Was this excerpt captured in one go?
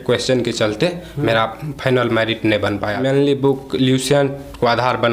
no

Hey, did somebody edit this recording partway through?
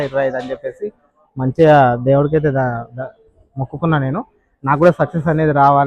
no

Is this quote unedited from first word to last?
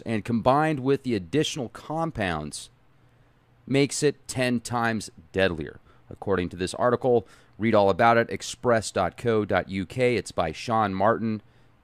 no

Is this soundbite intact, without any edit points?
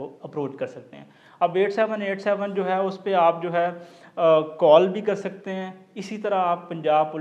yes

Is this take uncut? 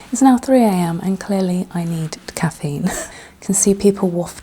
no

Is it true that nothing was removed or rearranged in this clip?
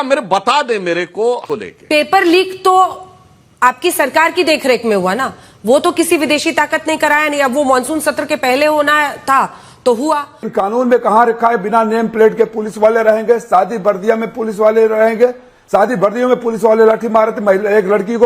no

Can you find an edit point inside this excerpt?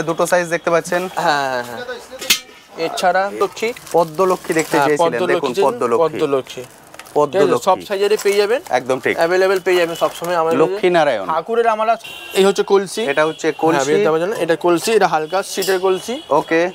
yes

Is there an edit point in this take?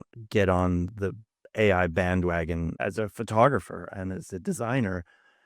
no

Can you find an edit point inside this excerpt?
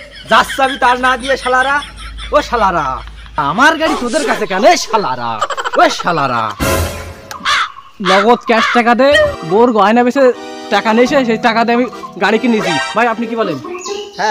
no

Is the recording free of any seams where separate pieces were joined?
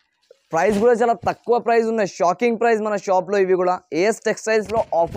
yes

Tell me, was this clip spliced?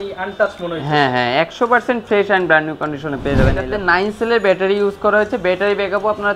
yes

